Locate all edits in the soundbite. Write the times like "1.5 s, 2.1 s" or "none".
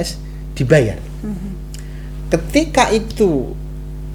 none